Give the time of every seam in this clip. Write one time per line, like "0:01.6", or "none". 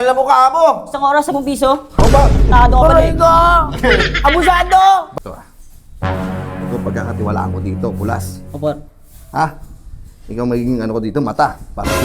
0:05.1